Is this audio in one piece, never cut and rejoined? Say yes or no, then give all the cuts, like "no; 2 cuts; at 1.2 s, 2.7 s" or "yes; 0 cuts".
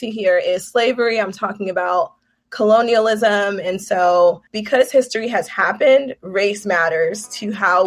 no; 1 cut; at 4.5 s